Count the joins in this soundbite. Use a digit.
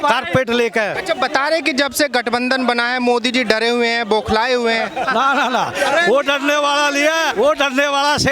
2